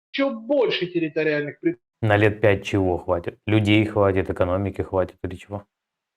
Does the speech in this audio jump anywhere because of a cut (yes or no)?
yes